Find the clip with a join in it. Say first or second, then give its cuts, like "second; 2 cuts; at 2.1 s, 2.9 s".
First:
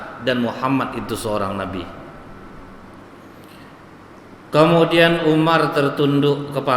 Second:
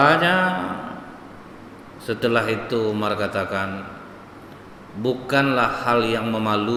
first; 1 cut; at 3.1 s